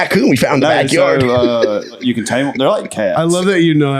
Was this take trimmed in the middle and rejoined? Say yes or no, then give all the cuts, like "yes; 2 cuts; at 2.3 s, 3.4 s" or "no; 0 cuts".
yes; 1 cut; at 2.0 s